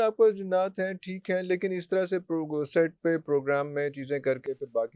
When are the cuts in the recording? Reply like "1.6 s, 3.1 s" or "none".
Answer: none